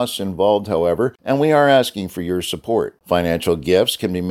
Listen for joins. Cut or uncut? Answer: cut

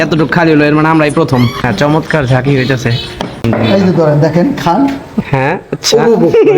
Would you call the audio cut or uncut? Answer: cut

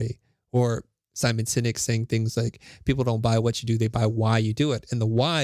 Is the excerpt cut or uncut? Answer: uncut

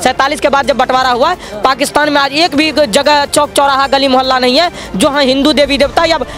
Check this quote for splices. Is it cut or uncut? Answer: uncut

